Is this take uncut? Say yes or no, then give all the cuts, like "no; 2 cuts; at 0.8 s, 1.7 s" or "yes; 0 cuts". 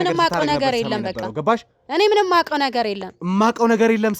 yes; 0 cuts